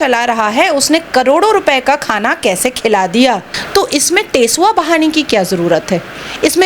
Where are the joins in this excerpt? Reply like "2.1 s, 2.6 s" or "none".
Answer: 3.5 s